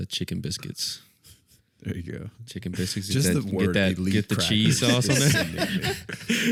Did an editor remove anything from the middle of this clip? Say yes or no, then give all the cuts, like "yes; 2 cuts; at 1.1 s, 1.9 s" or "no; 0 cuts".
no; 0 cuts